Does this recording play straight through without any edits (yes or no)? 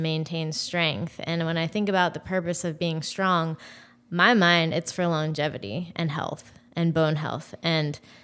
yes